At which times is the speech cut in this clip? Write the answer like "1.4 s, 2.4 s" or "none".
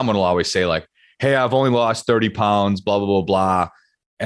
none